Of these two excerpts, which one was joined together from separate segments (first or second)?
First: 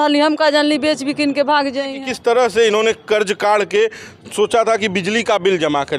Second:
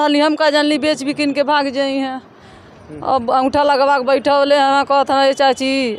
first